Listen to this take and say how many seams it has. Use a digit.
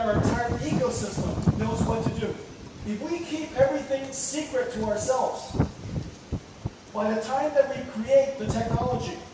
1